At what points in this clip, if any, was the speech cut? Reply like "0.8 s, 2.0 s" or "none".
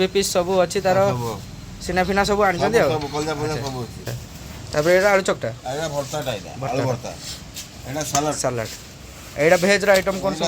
4.0 s